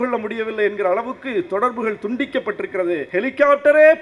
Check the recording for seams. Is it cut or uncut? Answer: cut